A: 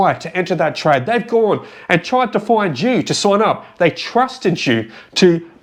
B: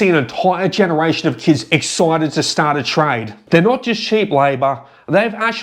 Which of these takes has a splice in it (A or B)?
B